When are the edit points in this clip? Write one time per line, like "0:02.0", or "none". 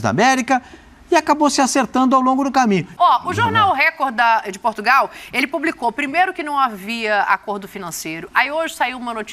0:02.9